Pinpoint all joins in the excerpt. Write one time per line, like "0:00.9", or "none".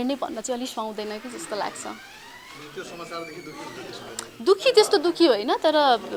none